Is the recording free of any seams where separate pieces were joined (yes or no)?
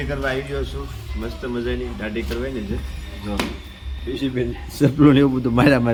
yes